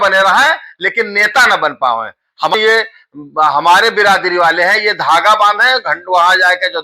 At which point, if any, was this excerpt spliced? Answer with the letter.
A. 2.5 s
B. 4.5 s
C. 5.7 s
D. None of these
A